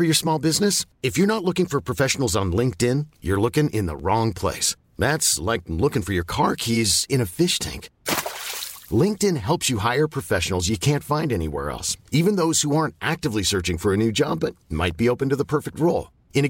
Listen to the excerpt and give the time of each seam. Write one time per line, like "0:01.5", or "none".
none

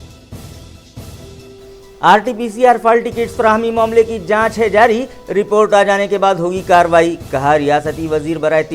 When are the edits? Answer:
0:01.1

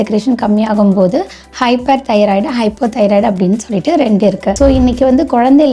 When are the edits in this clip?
0:04.6

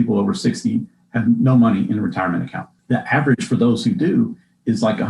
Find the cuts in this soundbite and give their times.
none

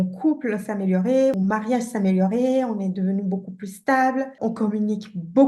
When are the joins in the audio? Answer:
0:01.3
0:04.3

